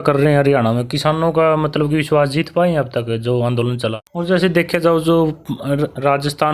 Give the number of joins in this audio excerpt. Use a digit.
1